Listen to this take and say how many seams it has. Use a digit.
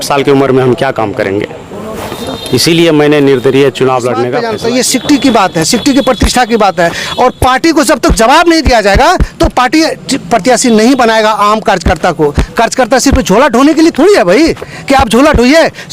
1